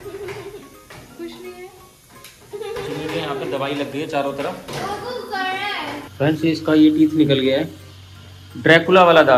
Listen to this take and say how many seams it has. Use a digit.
1